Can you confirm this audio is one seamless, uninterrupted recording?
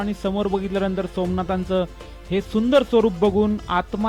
yes; 0 cuts

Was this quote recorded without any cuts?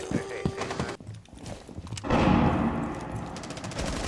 no; 1 cut; at 0.9 s

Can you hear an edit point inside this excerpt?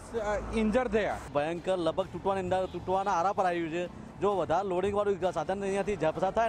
yes; 1 cut; at 1.2 s

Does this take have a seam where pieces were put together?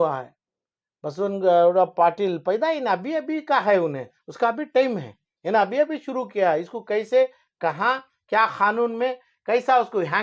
no; 0 cuts

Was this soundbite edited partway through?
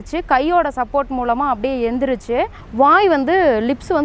yes; 1 cut; at 2.6 s

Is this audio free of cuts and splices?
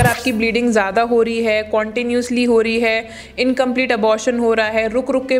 yes; 0 cuts

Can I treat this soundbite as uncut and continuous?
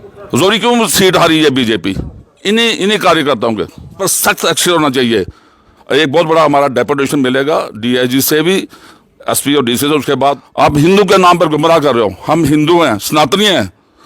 no; 2 cuts; at 4.0 s, 10.4 s

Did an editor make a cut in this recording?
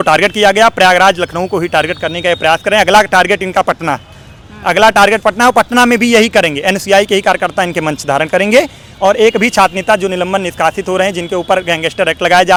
no; 0 cuts

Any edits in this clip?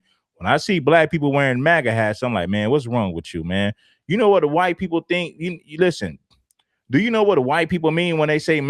yes; 2 cuts; at 3.7 s, 6.3 s

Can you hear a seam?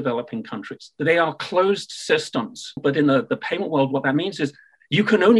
yes; 2 cuts; at 0.9 s, 2.8 s

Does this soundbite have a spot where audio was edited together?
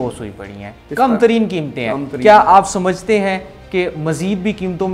no; 0 cuts

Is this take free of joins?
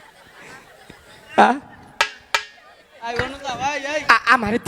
yes; 0 cuts

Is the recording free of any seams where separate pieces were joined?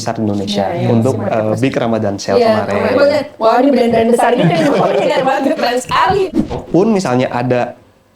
no; 1 cut; at 6.6 s

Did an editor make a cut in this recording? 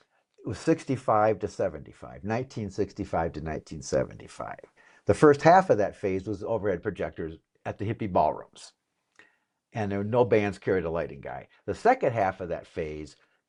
no; 0 cuts

